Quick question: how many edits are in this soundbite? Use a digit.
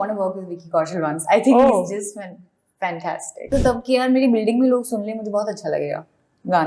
1